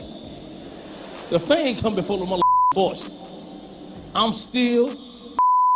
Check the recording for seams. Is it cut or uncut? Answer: uncut